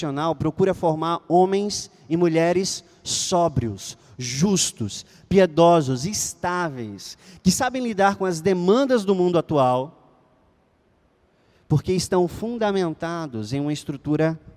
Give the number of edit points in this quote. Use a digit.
0